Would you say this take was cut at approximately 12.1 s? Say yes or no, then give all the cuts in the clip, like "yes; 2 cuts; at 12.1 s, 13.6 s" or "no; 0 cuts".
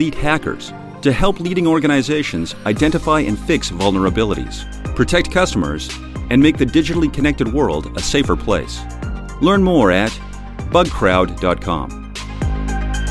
yes; 1 cut; at 12.1 s